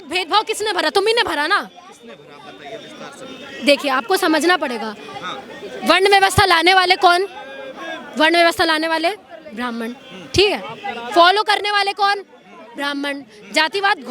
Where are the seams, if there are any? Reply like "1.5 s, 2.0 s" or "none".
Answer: none